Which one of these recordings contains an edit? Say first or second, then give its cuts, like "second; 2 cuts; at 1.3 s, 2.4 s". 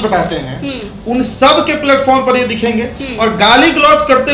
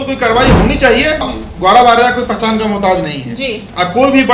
second; 1 cut; at 1.3 s